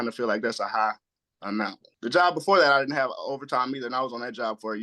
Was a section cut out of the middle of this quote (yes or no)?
yes